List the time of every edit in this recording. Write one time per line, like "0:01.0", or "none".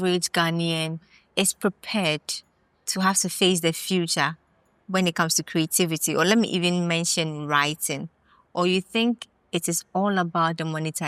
none